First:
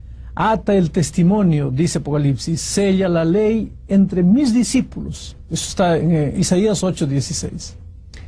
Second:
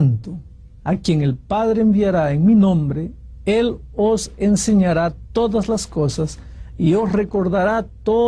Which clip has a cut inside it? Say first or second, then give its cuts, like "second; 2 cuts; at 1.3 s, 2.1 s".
second; 1 cut; at 4.3 s